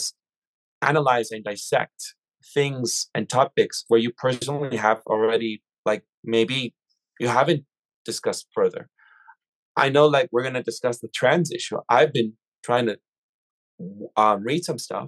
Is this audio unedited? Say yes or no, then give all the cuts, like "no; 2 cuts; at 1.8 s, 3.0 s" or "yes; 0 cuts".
yes; 0 cuts